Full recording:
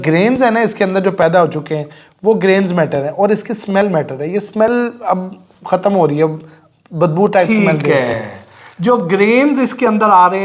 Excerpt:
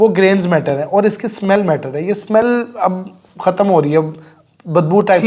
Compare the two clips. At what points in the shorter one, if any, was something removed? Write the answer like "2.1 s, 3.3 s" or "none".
none

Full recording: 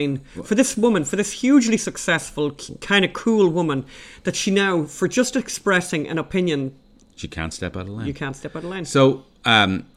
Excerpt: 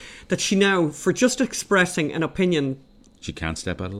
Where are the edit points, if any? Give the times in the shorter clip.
none

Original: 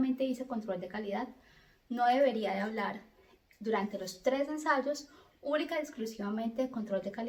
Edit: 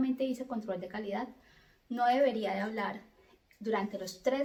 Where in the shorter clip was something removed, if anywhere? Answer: none

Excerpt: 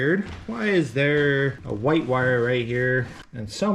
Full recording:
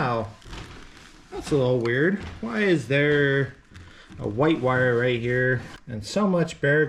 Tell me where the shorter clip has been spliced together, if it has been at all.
1.6 s

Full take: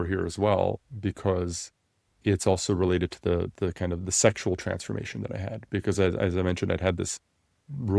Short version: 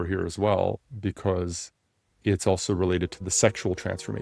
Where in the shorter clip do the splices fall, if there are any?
3.2 s

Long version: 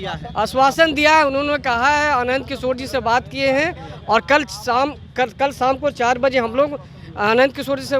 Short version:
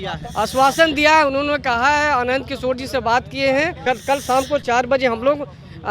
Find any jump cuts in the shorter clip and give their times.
3.8 s

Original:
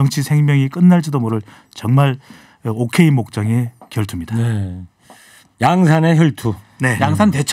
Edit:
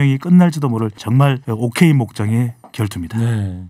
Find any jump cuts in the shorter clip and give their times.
1.1 s

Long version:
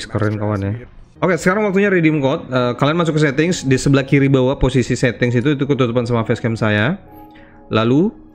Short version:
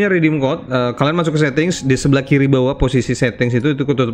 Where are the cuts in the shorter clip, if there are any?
none

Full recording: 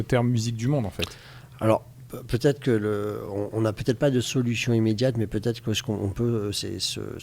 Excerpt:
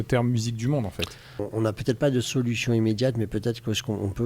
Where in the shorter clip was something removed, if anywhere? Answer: 1.3 s

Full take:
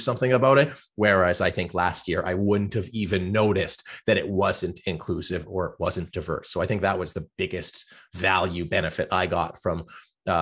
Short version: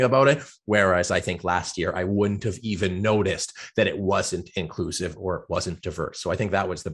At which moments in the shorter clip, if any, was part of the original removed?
none

